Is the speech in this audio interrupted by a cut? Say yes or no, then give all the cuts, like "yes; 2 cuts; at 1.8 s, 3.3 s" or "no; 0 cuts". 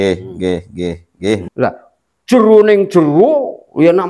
yes; 1 cut; at 1.5 s